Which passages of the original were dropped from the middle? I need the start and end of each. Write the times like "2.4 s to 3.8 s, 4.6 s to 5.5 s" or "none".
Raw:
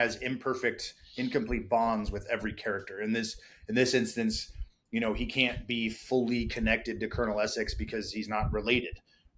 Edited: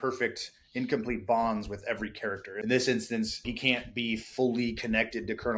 2.9 s to 3.6 s, 4.6 s to 5.2 s